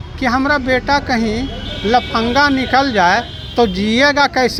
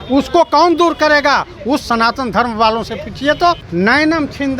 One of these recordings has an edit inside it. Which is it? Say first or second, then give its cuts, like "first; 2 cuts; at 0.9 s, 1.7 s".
second; 1 cut; at 3.6 s